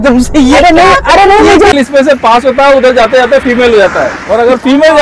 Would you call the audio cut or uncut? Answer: cut